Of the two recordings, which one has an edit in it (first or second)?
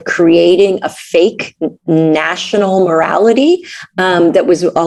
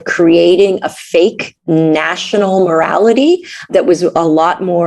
second